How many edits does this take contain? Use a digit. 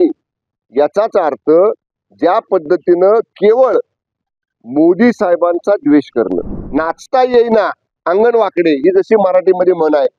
1